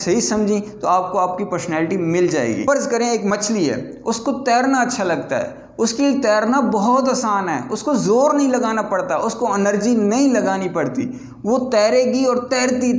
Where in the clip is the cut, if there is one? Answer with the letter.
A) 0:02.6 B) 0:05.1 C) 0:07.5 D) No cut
A